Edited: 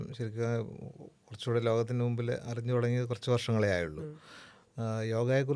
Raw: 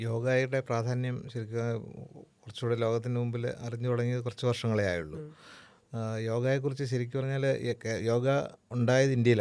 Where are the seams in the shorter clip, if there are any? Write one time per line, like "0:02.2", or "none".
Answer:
none

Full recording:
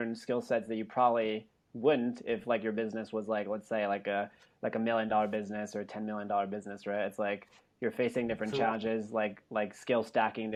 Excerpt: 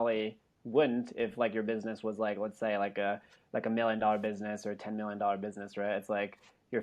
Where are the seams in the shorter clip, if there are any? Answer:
none

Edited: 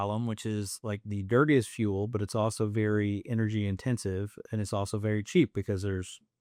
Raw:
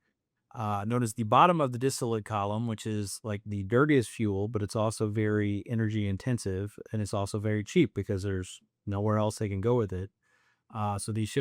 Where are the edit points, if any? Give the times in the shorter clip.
none

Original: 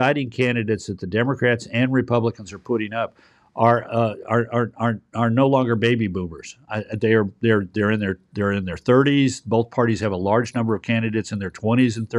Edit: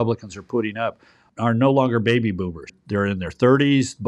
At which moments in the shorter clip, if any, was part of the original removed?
0:01.3
0:02.7

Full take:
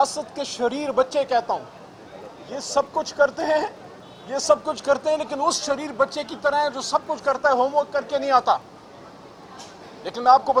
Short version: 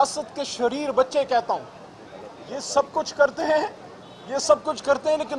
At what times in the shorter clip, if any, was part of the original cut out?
none

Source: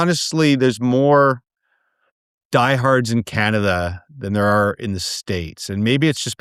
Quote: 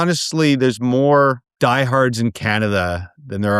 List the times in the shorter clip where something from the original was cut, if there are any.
0:01.5

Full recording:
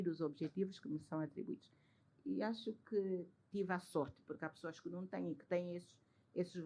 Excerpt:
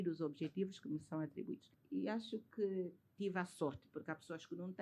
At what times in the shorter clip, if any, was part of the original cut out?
0:01.7

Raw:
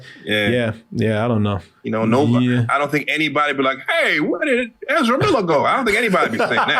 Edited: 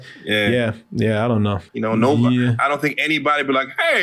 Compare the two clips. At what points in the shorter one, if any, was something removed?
0:01.7

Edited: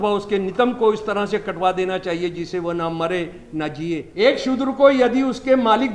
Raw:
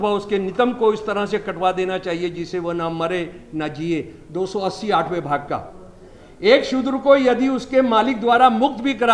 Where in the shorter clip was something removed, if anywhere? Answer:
0:04.1

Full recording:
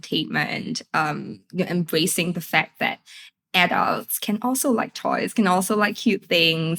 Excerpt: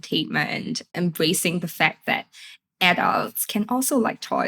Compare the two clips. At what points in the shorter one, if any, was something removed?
0:00.9

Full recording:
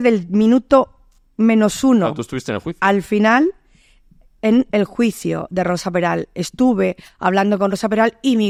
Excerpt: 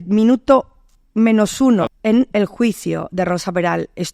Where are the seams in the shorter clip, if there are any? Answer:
0:01.9

